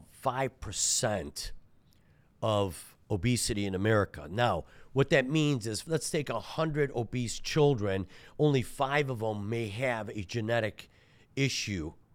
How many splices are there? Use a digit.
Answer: 1